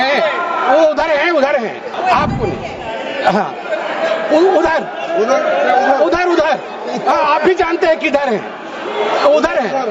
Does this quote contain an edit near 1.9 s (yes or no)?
yes